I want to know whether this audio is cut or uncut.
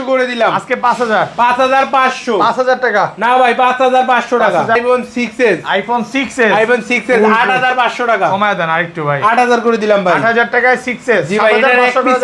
cut